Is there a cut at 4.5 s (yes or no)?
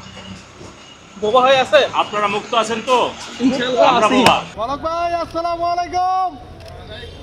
yes